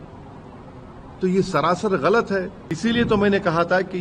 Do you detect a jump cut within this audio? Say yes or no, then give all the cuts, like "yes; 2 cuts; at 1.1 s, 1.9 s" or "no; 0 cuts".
yes; 1 cut; at 2.6 s